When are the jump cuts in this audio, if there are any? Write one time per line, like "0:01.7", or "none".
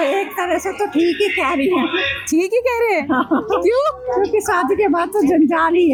none